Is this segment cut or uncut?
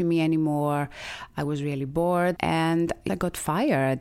cut